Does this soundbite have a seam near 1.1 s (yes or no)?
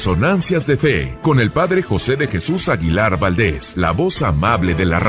yes